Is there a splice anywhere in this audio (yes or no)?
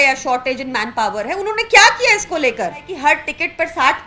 yes